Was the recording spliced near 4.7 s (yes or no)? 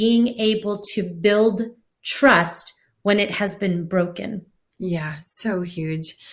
no